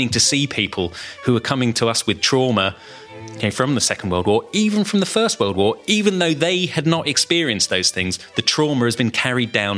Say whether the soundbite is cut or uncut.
cut